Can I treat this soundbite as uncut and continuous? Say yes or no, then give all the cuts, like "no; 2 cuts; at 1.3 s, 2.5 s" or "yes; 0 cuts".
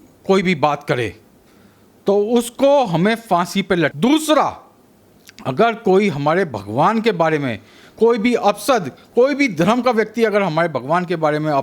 no; 1 cut; at 3.9 s